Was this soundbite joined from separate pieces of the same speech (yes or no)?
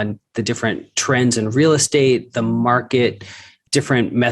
no